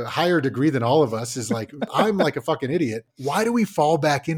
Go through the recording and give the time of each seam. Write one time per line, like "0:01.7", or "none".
0:01.9
0:03.1